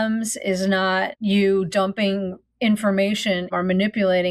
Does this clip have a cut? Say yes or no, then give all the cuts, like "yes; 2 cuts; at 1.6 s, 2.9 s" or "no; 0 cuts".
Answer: yes; 2 cuts; at 1.1 s, 3.5 s